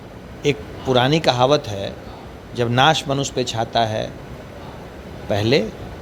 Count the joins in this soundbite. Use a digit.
0